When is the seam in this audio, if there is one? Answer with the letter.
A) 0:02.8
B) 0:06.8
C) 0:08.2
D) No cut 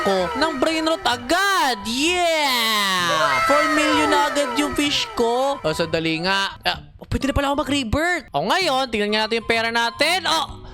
C